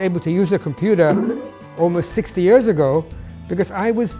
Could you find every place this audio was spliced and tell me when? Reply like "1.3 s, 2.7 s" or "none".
none